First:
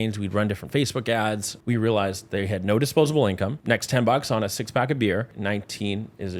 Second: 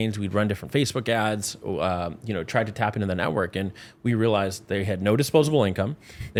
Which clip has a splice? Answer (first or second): first